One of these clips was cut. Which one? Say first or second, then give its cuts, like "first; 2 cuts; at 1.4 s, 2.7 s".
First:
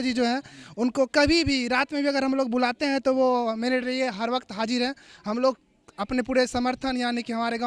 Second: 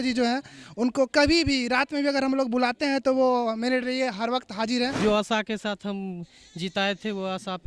second; 1 cut; at 5.0 s